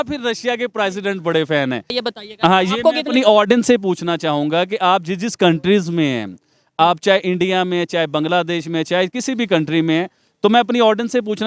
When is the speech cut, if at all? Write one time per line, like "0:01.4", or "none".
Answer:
0:01.9